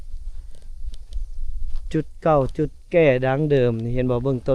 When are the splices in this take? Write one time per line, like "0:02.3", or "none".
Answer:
none

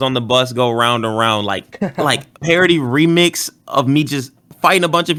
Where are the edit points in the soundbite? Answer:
none

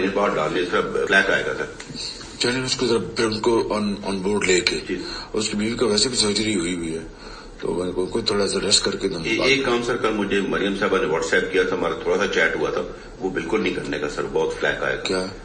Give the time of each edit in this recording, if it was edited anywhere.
0:01.1

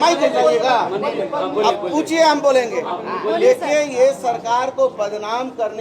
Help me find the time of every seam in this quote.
none

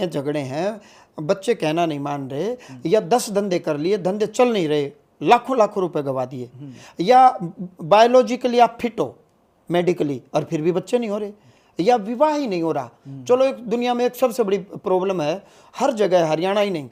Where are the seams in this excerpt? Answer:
none

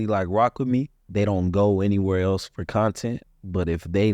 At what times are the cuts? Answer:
0:01.0

